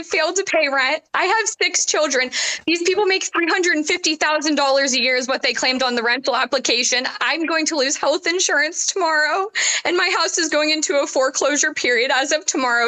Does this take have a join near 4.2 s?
no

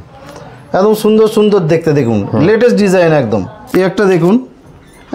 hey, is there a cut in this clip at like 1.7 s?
no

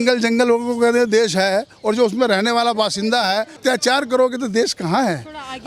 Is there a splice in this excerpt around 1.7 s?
no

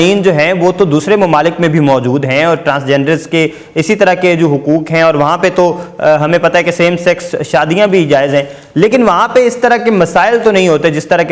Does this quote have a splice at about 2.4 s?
no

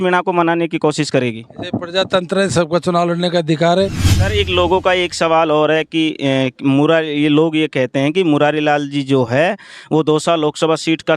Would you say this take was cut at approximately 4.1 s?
yes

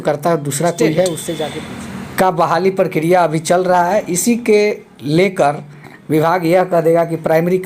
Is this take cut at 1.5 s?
yes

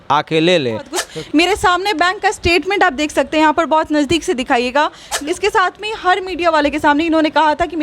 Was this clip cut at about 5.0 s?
yes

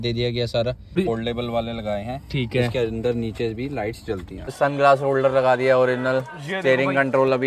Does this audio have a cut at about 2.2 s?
no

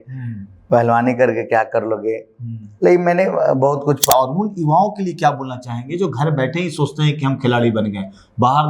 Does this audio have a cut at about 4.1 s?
yes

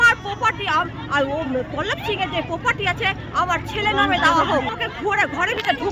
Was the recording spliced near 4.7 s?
yes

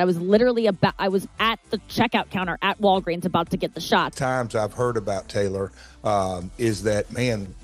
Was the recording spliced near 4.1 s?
yes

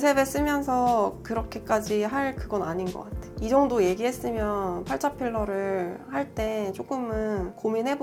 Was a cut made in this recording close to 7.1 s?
no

